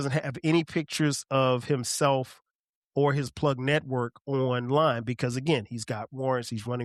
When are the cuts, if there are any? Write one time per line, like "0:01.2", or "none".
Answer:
none